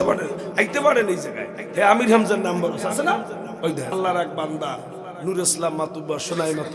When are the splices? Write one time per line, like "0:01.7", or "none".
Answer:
0:03.9